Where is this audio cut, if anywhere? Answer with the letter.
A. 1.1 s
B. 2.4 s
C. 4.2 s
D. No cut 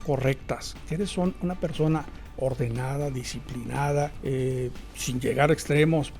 C